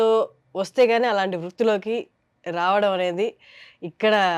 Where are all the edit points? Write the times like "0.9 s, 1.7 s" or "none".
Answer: none